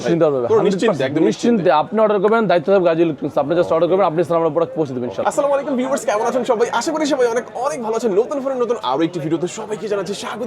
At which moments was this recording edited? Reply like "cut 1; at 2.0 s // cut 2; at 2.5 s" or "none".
cut 1; at 5.2 s